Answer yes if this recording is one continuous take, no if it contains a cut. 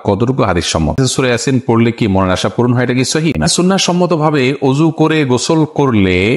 no